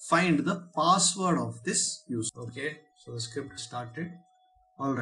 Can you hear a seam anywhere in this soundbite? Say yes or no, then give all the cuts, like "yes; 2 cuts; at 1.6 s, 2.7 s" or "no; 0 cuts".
yes; 1 cut; at 2.4 s